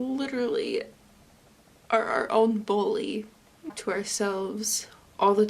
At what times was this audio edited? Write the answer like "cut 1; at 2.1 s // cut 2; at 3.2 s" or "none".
cut 1; at 3.7 s